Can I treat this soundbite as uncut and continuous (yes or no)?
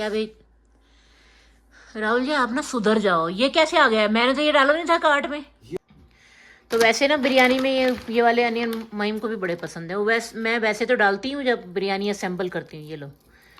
no